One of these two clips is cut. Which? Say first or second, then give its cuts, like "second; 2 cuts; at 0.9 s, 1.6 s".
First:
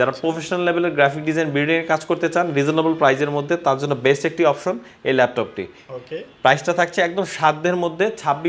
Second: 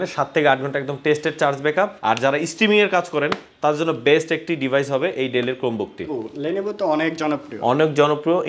second; 2 cuts; at 2.0 s, 6.1 s